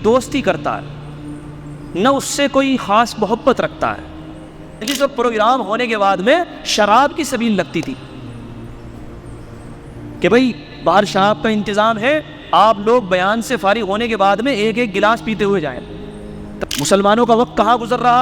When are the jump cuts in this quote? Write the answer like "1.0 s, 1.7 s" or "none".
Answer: 4.8 s, 16.6 s